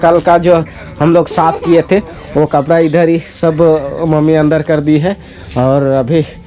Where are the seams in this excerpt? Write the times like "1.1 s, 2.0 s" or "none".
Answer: none